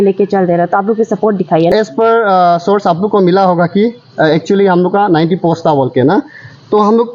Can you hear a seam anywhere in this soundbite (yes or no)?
yes